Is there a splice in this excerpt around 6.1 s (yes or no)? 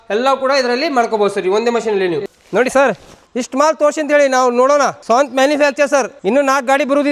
yes